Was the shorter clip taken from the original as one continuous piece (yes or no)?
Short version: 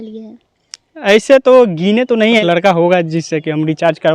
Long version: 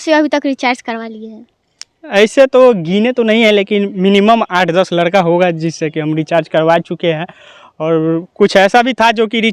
no